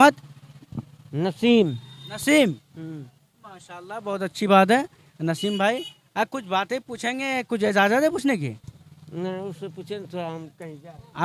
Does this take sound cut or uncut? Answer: uncut